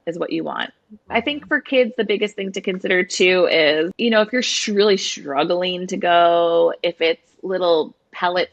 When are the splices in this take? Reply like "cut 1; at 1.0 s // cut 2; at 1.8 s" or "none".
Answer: none